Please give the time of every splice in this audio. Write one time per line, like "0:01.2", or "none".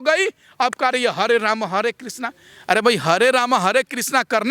none